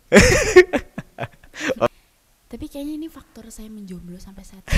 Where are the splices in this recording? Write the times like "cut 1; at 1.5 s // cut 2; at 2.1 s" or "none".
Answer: cut 1; at 1.9 s